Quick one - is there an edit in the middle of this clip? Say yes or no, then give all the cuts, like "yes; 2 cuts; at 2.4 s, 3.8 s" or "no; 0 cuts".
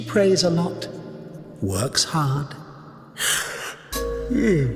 yes; 2 cuts; at 1.5 s, 3.0 s